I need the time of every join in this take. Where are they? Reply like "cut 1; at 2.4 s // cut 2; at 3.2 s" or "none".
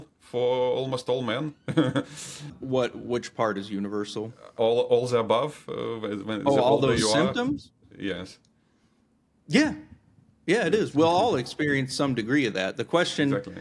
cut 1; at 2.4 s // cut 2; at 4.5 s